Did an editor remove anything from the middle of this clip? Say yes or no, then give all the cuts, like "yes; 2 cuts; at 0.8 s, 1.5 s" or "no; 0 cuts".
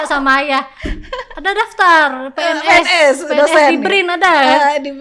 no; 0 cuts